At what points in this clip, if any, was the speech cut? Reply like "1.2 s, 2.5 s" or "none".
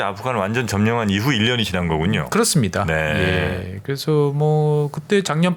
none